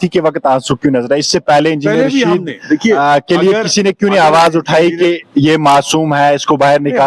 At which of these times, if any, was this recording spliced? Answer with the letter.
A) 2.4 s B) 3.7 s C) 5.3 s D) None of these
D